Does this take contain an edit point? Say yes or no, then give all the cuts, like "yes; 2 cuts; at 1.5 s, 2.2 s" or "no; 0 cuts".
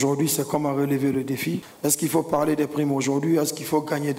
yes; 1 cut; at 1.7 s